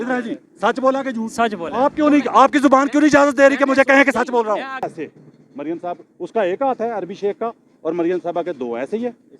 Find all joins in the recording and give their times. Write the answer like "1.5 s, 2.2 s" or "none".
4.9 s